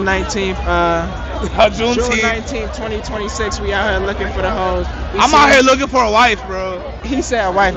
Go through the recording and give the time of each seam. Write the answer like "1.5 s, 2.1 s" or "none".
none